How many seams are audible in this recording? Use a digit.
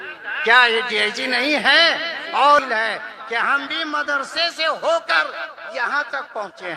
1